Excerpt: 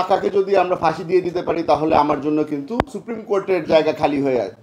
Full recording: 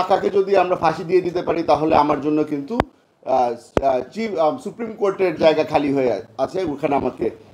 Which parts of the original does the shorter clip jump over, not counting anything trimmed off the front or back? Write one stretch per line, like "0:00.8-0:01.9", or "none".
0:03.1-0:04.8